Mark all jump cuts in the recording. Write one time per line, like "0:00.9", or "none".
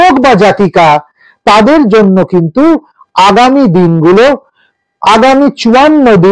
none